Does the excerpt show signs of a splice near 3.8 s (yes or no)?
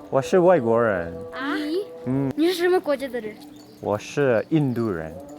no